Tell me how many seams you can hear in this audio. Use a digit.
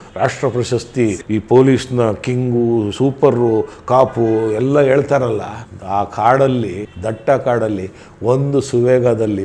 1